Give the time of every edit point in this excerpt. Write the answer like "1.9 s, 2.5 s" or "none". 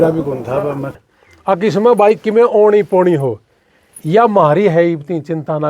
1.0 s